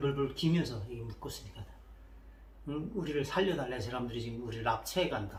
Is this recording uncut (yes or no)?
yes